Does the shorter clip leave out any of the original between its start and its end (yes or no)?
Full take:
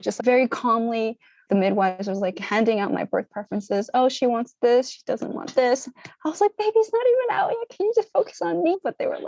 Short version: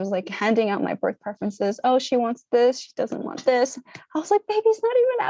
no